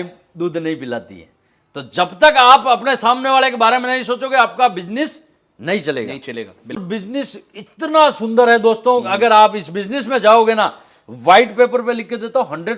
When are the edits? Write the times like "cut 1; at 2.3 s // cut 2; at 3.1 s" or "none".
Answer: cut 1; at 6.8 s